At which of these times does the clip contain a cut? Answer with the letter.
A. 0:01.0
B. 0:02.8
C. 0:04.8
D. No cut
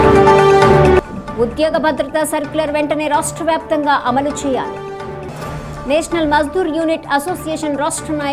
A